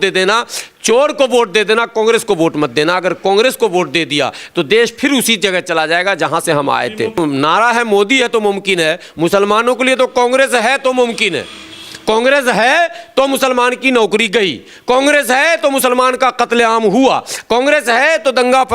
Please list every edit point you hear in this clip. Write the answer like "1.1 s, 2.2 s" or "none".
7.2 s